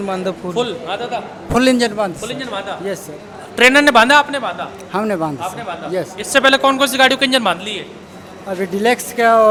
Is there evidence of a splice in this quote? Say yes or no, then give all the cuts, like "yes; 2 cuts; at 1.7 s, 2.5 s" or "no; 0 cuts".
no; 0 cuts